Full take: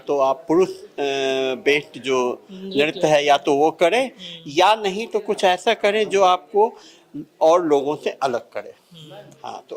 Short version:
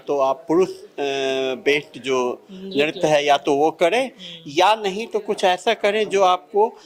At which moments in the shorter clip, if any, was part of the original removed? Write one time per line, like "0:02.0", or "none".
none